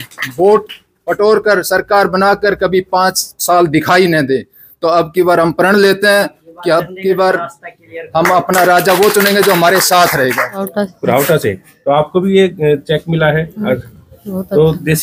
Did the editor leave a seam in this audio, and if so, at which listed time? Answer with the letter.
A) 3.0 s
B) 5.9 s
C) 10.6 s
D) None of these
C